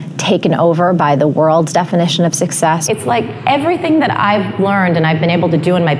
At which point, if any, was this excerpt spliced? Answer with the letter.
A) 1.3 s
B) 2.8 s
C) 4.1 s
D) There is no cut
B